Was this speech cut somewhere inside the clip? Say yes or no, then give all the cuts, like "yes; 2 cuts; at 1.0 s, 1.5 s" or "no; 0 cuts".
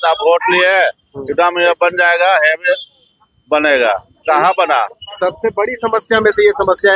no; 0 cuts